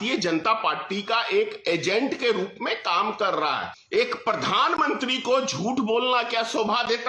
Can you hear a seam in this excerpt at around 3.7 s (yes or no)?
yes